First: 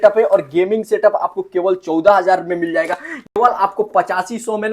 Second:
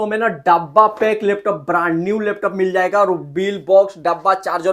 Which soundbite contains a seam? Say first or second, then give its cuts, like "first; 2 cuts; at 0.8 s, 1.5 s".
first; 1 cut; at 3.2 s